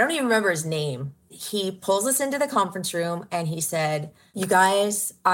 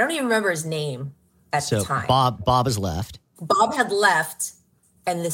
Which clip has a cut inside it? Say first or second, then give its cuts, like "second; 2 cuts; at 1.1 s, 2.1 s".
first; 2 cuts; at 1.4 s, 4.2 s